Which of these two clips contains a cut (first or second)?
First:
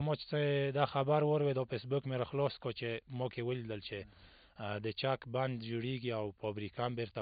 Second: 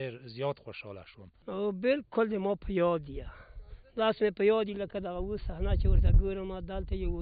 second